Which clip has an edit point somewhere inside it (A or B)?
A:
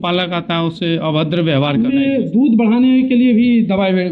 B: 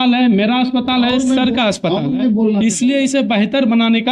A